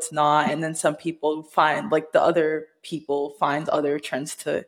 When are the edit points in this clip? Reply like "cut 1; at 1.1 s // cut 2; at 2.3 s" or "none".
none

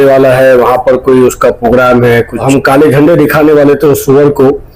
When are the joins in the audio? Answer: cut 1; at 2.4 s

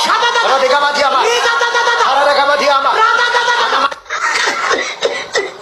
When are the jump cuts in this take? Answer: none

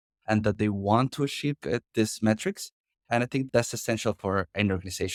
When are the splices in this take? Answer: none

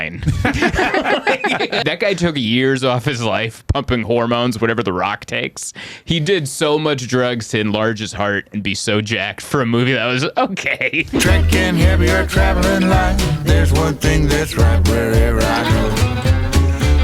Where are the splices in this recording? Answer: cut 1; at 1.8 s // cut 2; at 11.1 s

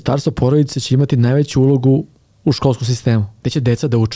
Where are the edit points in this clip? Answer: cut 1; at 2.2 s // cut 2; at 3.3 s

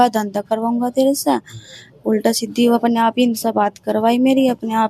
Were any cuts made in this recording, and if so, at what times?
none

